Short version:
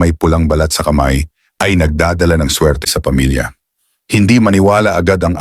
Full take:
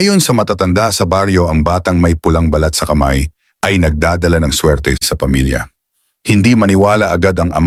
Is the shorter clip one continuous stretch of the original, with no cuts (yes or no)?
no